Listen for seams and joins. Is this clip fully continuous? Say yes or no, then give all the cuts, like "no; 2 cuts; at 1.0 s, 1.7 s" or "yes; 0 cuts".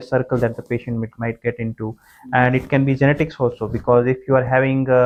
yes; 0 cuts